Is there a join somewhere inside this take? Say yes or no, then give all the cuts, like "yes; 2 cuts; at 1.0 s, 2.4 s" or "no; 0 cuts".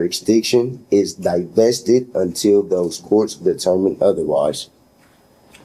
no; 0 cuts